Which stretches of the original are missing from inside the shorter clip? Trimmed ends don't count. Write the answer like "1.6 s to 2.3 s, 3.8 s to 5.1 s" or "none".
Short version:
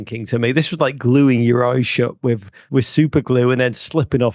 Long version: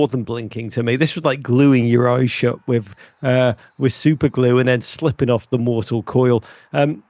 3.0 s to 3.7 s

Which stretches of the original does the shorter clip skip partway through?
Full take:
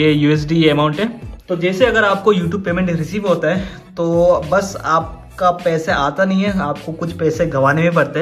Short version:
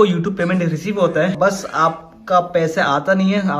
3.6 s to 4.5 s

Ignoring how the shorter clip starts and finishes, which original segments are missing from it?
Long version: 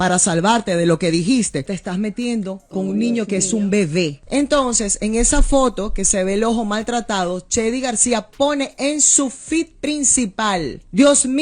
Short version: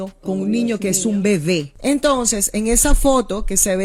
none

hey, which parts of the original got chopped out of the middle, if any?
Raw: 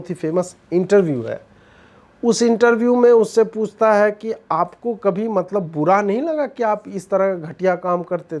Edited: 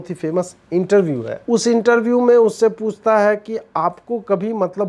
1.3 s to 2.1 s

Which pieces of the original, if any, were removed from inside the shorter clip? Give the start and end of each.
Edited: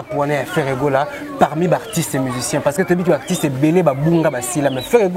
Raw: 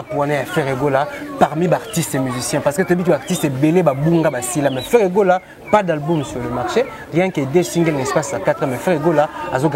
none

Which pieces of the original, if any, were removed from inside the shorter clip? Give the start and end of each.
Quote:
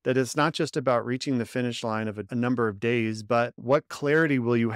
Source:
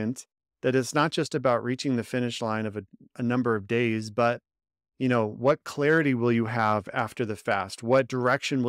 2.8 s to 3.1 s, 4.5 s to 5.3 s

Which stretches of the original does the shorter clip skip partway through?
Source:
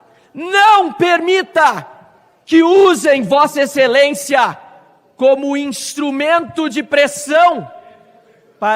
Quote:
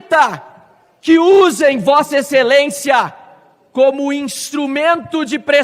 none

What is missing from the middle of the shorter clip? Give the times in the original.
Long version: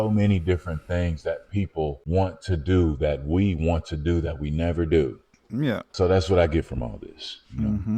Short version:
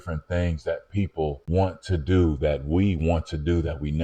none

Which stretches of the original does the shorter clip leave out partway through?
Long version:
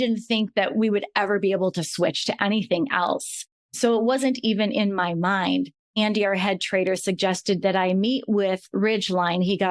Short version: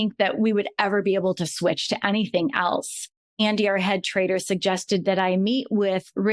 3.6 s to 5.8 s

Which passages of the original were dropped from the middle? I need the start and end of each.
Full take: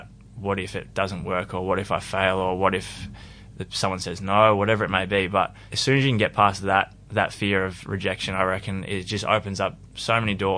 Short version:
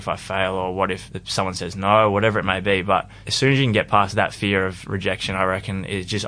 3.0 s to 3.6 s, 6.6 s to 7.1 s

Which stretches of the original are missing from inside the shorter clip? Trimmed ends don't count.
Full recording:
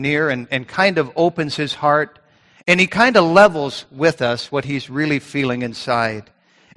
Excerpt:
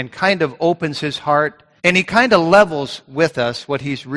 2.2 s to 2.5 s

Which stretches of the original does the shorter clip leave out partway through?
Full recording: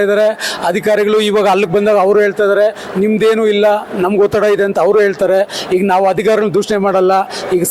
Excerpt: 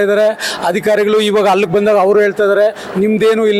none

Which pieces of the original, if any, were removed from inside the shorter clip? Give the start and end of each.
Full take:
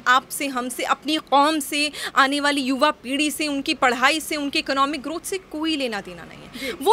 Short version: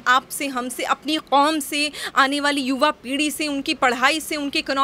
none

